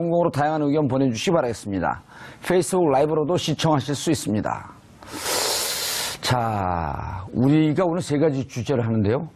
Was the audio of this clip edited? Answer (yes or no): no